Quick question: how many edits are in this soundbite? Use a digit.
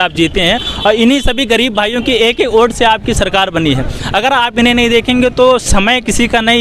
0